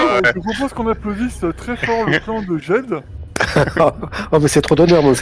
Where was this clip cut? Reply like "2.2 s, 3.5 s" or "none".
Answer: none